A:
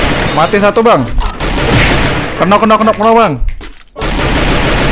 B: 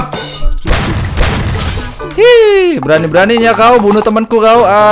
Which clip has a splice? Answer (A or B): A